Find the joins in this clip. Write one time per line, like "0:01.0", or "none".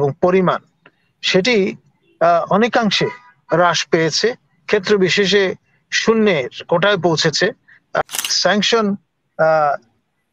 0:08.0